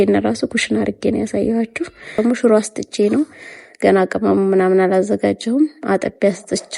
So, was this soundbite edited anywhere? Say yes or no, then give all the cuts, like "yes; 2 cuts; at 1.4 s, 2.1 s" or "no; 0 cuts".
yes; 1 cut; at 2.2 s